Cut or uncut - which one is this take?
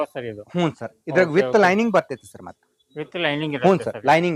uncut